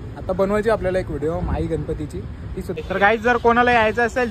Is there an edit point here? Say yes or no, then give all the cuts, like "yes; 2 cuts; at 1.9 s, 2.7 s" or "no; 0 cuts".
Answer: yes; 1 cut; at 2.8 s